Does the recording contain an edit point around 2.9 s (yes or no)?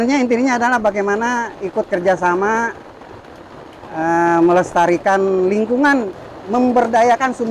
no